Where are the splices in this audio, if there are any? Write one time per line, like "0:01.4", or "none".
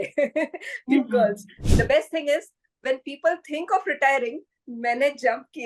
0:01.5